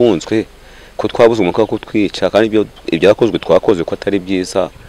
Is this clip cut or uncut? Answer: uncut